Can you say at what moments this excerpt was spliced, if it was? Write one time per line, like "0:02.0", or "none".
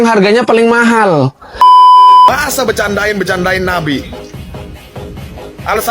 0:01.6
0:02.4

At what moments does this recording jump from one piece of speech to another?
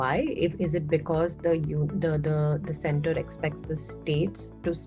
none

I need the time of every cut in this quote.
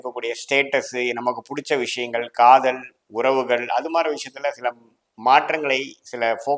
none

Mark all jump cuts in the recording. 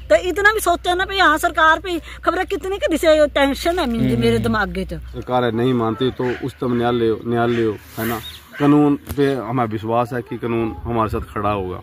0:05.1

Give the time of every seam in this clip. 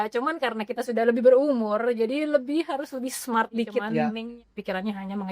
0:03.9

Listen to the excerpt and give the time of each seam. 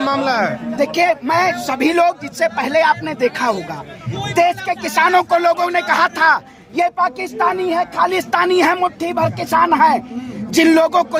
none

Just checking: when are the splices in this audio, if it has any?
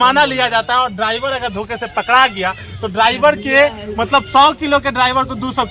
none

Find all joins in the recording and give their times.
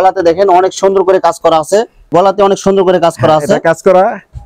0:02.1

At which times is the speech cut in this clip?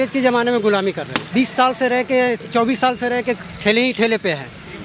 0:01.1

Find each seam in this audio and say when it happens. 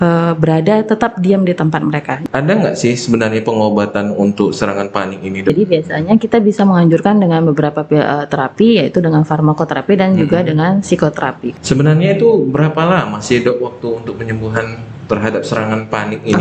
0:02.1
0:05.5
0:11.4

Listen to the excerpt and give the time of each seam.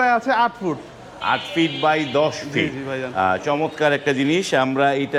none

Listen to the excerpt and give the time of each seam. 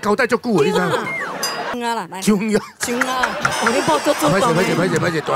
0:01.8

